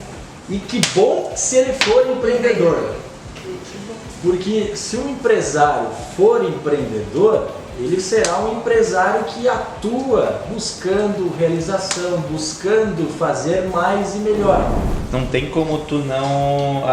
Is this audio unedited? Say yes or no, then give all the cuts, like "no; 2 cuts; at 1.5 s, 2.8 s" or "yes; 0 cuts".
no; 1 cut; at 14.9 s